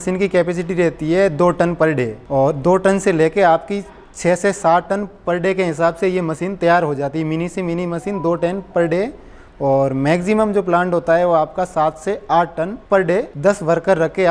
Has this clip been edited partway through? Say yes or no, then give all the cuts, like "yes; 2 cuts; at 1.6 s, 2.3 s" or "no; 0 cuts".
no; 0 cuts